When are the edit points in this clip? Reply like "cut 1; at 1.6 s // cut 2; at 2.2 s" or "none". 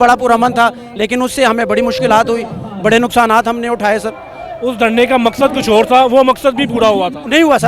none

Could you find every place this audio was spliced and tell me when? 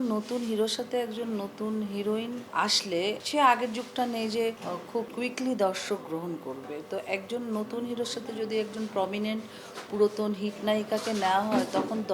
cut 1; at 2.8 s // cut 2; at 5.1 s

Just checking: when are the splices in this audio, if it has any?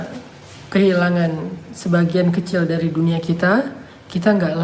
none

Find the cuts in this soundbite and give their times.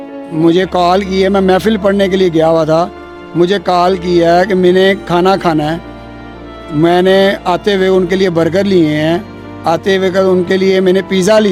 none

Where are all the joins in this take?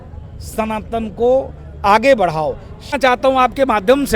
cut 1; at 3.0 s

